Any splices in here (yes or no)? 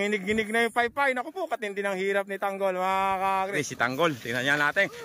yes